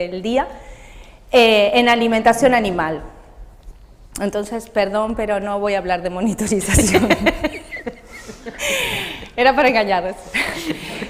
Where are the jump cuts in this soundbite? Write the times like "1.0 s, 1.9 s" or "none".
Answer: none